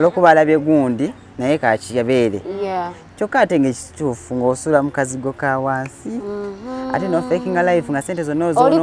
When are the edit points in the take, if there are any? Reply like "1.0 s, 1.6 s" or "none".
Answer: none